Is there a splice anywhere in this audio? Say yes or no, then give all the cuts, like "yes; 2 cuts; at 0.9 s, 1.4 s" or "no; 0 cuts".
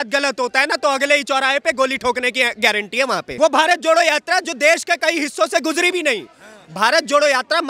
yes; 1 cut; at 3.3 s